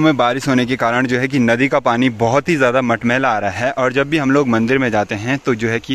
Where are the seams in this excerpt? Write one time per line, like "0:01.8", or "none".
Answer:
none